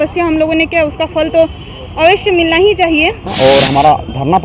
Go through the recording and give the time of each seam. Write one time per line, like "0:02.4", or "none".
0:03.3